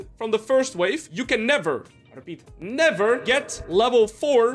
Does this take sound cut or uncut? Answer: cut